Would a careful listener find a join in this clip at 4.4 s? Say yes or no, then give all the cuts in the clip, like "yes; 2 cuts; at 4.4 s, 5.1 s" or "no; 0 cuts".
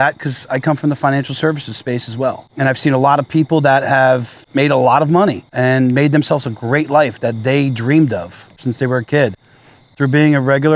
yes; 4 cuts; at 2.5 s, 4.4 s, 5.5 s, 8.5 s